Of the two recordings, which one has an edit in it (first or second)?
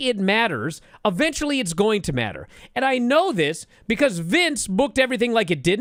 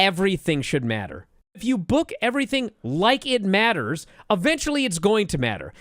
second